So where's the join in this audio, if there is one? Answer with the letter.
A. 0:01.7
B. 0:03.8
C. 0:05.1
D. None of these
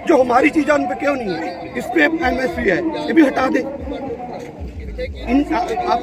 A